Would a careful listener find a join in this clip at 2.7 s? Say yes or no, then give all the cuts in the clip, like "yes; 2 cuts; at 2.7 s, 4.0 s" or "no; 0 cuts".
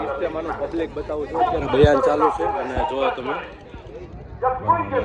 no; 0 cuts